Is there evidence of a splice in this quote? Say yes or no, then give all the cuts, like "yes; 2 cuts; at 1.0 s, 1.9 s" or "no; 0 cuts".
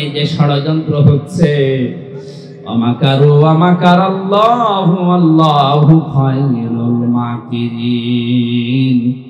no; 0 cuts